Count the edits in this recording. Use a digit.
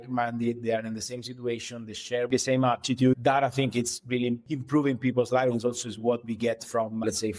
2